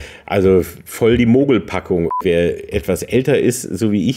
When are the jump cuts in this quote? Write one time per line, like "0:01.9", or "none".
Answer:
0:02.2